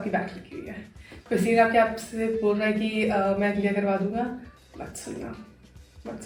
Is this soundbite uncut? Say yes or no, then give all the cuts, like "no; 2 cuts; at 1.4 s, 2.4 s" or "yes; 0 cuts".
yes; 0 cuts